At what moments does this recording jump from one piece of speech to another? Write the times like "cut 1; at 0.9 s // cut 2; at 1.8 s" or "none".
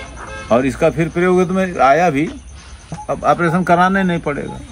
cut 1; at 3.0 s

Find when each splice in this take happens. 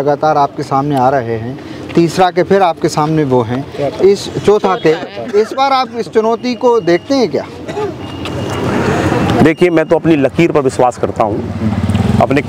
none

